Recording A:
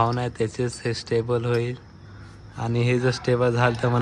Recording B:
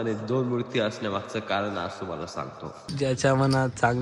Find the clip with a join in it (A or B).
B